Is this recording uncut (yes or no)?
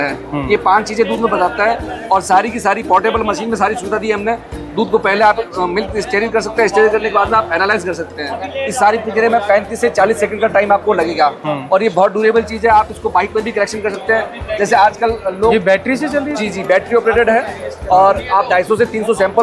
yes